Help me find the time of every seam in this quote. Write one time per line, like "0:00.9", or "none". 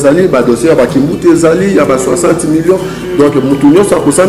none